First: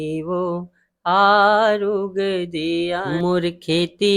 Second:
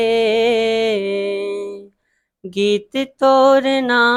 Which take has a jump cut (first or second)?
first